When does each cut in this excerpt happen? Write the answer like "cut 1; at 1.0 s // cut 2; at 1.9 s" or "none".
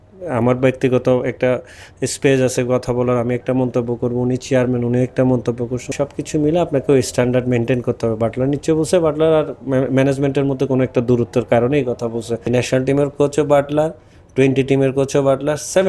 cut 1; at 5.9 s // cut 2; at 12.5 s